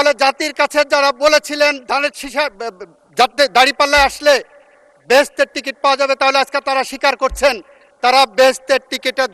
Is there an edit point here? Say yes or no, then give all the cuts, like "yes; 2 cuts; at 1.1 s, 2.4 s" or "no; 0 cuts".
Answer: no; 0 cuts